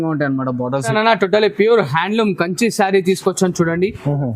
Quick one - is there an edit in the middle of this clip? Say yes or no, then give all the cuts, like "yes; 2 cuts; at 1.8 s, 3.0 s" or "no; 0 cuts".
yes; 1 cut; at 0.9 s